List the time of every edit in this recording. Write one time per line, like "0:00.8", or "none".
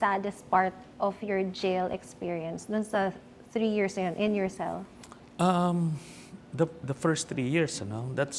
none